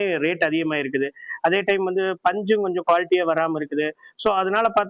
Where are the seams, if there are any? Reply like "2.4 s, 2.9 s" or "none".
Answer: none